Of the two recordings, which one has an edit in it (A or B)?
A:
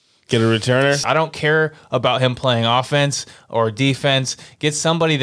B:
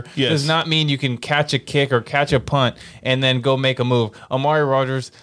A